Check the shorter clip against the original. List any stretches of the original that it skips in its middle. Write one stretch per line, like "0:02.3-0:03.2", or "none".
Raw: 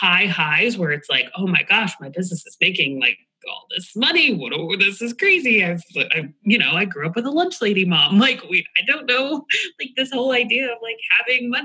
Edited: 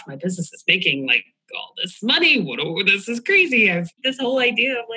0:05.9-0:09.9

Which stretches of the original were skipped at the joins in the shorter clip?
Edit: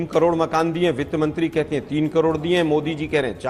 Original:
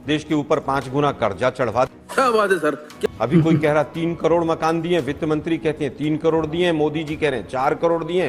none

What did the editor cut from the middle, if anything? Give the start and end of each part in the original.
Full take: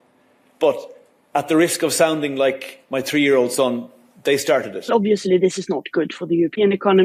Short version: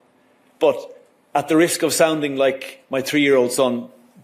none

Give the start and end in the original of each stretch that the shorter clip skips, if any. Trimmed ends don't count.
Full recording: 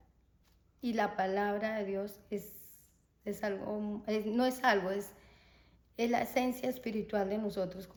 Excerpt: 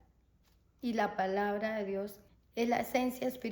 0:02.2-0:05.6

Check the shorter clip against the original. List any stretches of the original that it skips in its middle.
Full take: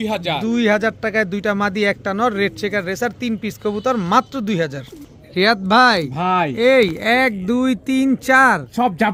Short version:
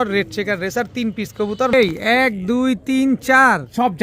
0:04.0-0:06.7

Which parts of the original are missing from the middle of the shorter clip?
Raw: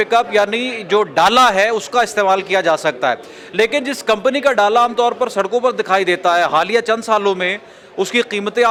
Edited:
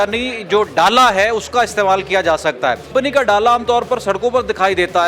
0:03.3-0:04.2

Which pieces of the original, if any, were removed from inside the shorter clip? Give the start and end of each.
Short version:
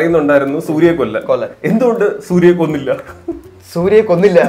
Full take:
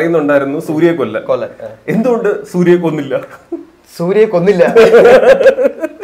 0:01.5-0:01.8

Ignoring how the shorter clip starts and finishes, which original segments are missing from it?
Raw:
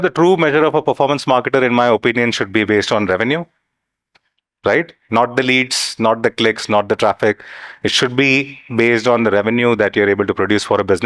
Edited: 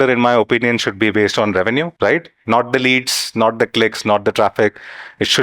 0:03.5-0:04.6

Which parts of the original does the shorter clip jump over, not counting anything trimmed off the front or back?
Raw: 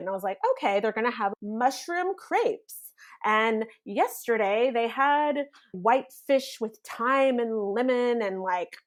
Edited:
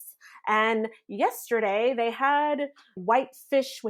none

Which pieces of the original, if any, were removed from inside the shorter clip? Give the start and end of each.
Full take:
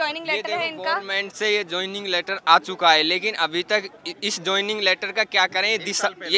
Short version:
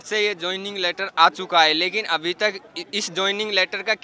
none

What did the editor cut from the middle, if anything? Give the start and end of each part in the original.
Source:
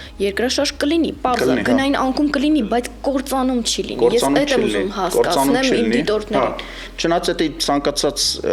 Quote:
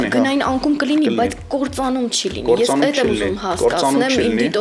none

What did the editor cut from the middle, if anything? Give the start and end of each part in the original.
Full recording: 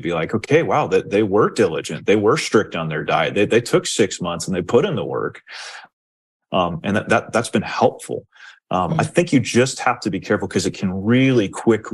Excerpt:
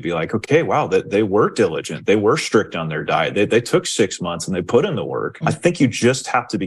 0:05.4-0:08.9

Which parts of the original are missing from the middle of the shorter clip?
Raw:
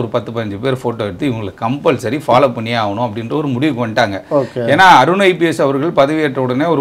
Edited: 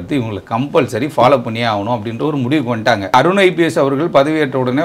0:04.3-0:05.0

